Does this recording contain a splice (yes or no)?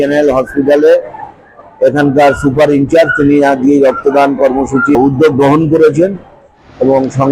yes